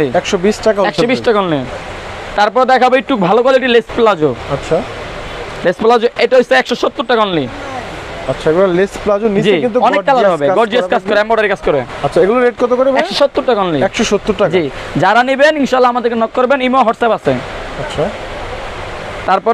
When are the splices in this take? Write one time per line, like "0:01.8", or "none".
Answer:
none